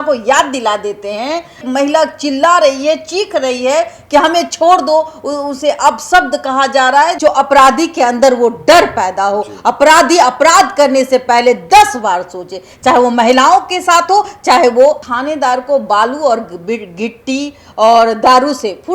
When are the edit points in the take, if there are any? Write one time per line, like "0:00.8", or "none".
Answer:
0:01.6
0:07.2
0:15.0